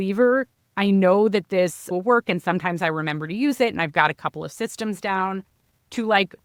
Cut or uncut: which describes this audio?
uncut